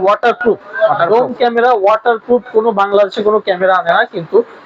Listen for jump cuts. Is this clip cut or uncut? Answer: uncut